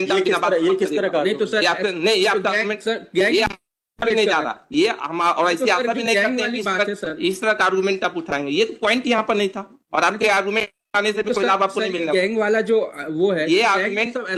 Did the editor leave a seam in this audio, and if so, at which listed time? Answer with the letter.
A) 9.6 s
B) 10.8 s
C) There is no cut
C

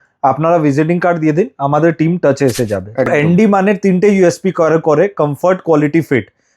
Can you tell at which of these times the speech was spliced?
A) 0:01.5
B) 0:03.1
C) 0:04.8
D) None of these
B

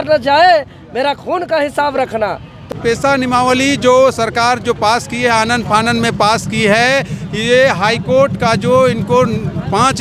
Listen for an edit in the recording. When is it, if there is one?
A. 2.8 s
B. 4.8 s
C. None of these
A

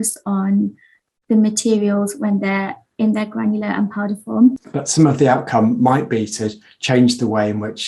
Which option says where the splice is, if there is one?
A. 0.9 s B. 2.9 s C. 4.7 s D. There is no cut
C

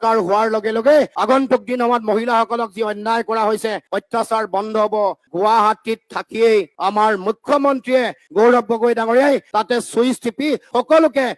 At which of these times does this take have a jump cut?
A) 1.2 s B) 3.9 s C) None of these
A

